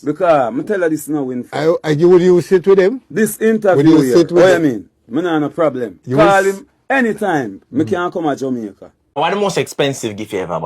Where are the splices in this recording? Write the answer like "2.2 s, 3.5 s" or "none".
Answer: 9.2 s